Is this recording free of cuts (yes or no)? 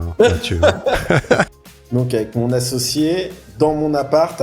no